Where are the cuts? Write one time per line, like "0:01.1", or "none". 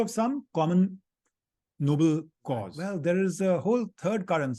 0:02.8